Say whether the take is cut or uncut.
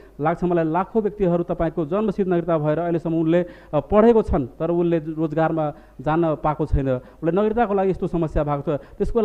uncut